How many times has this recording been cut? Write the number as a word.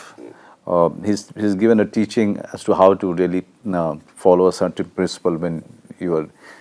zero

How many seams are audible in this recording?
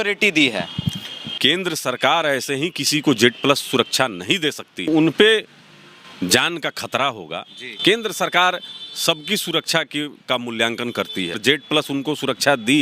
three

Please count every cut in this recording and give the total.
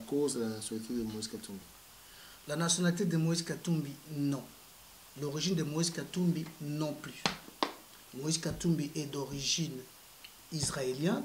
zero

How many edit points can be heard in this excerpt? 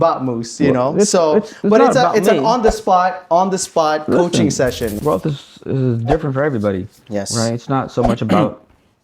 one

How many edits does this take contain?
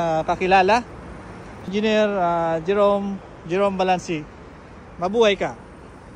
one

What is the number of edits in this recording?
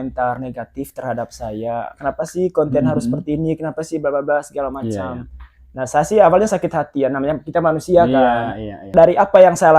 one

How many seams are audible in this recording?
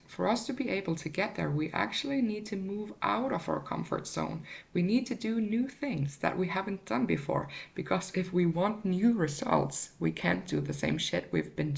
zero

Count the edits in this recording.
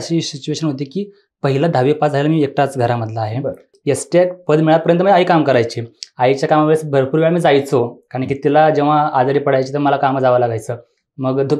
one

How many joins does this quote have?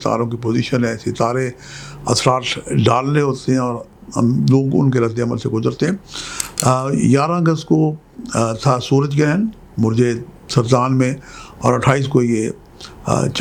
zero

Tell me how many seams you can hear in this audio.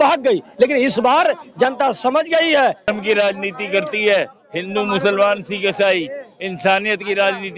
one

